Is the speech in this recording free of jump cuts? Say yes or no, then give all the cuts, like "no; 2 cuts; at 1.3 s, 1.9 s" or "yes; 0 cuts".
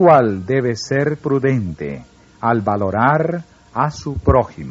no; 1 cut; at 3.5 s